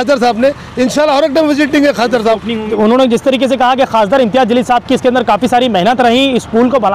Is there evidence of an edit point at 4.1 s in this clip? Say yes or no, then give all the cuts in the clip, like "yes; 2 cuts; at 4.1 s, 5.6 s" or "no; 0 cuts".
no; 1 cut; at 2.7 s